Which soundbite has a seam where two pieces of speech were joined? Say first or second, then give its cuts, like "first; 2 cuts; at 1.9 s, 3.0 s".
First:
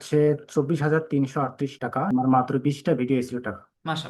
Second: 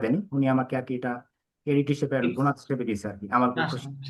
first; 1 cut; at 2.0 s